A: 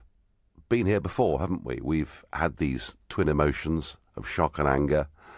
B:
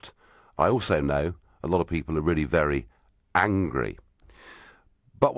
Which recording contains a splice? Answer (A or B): A